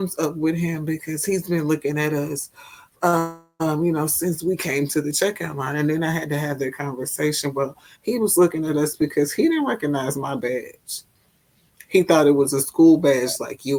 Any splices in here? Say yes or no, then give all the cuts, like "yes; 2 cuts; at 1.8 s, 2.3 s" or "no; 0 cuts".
no; 0 cuts